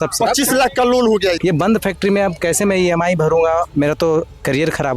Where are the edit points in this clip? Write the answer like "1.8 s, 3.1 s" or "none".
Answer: 1.4 s